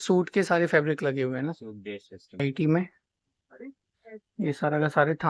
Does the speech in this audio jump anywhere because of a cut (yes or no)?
yes